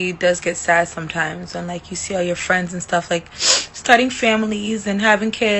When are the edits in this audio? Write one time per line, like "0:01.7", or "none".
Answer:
none